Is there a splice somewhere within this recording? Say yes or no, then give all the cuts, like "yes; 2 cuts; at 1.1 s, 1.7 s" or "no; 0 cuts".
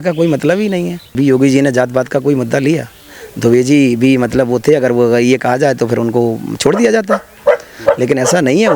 yes; 1 cut; at 1.2 s